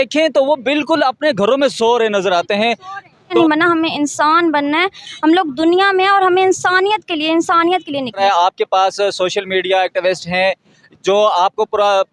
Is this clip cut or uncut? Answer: cut